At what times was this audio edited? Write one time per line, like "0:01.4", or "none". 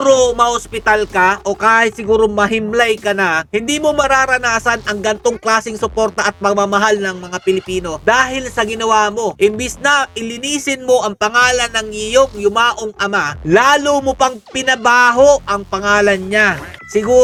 none